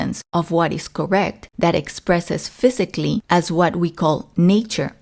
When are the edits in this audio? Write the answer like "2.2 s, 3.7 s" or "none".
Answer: 1.4 s